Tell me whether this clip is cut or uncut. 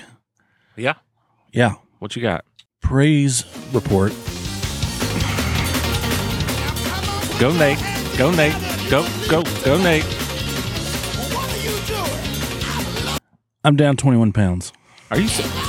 uncut